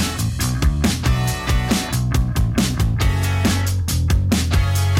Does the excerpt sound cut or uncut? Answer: cut